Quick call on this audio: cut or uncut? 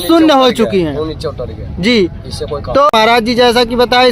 cut